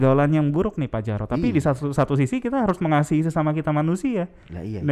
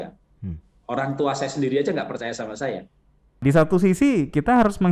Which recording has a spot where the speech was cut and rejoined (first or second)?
second